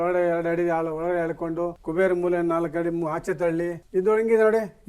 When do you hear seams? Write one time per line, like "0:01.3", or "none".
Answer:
0:01.8
0:03.8